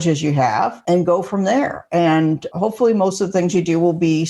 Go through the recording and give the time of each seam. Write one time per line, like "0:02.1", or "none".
0:00.8
0:02.5

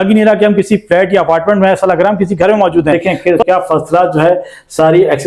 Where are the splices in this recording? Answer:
0:03.0

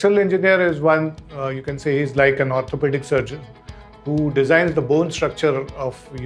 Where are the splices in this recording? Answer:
none

